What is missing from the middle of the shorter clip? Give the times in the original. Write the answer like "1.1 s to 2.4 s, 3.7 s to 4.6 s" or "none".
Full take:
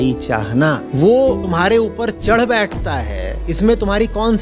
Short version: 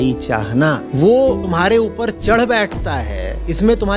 none